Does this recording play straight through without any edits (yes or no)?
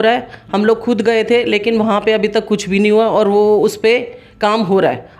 yes